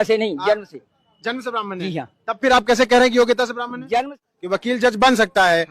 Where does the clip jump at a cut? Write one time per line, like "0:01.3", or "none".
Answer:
0:04.2